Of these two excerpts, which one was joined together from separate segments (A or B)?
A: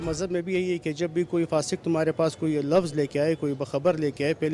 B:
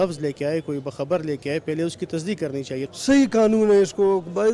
B